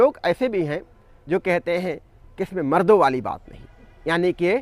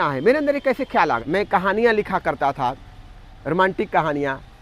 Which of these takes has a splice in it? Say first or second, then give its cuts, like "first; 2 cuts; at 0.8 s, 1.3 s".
second; 1 cut; at 1.2 s